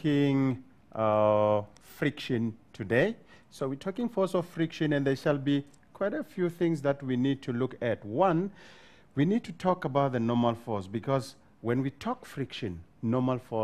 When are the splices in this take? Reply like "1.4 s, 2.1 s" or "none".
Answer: none

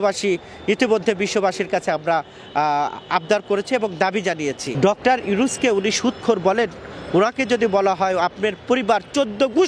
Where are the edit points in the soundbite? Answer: 4.7 s

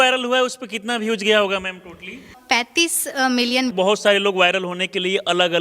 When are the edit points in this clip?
2.4 s, 3.7 s

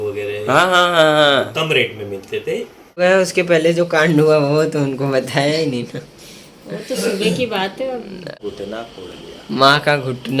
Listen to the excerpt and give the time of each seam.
3.0 s, 8.3 s

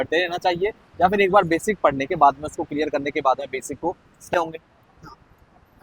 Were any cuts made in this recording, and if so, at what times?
4.3 s

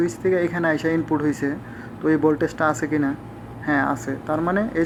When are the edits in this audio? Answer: none

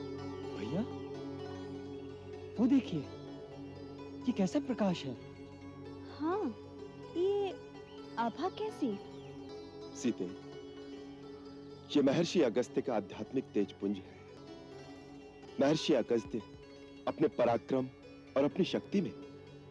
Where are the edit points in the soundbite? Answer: 9.5 s, 14.4 s, 15.4 s

